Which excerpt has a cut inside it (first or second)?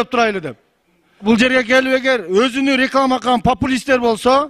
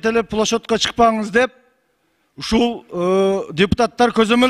first